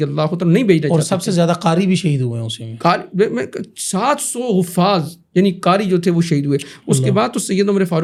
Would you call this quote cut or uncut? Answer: uncut